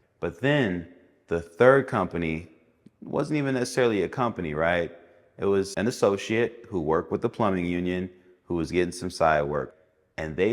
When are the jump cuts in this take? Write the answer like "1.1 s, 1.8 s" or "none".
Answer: 5.7 s, 9.7 s